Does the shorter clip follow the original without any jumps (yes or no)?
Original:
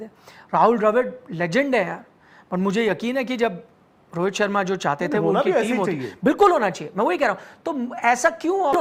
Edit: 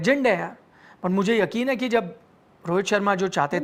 yes